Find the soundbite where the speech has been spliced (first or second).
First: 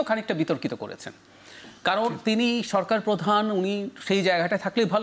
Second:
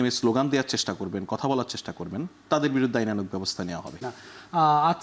second